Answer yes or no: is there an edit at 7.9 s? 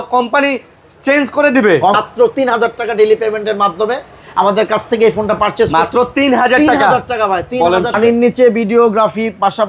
yes